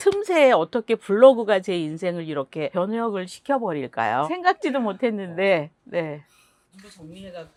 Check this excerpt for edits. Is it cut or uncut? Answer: uncut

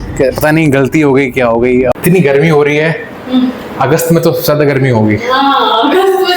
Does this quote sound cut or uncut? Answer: cut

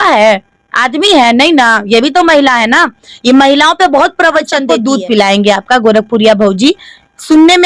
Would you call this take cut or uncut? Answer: cut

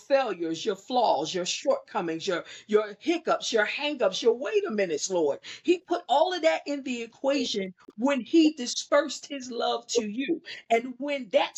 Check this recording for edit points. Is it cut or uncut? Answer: uncut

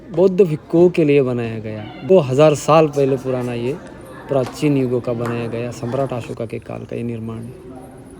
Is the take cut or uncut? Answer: cut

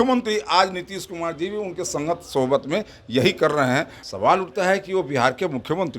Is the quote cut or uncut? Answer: cut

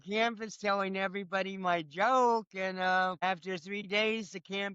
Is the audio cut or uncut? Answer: cut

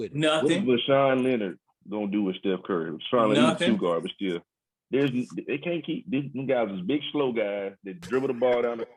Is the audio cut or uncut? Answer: uncut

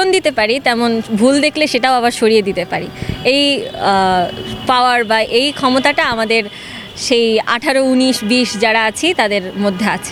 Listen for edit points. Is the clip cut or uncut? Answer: uncut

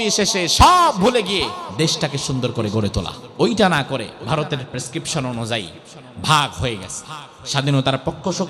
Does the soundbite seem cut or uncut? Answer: cut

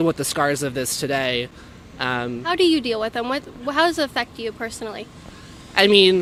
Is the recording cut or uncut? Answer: uncut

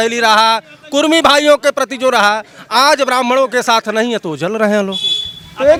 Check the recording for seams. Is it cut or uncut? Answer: uncut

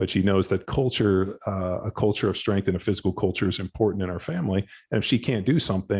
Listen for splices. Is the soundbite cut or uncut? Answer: uncut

